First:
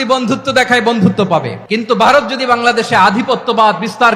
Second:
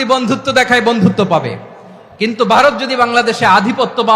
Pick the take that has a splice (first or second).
first